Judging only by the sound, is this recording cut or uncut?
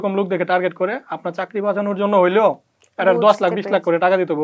uncut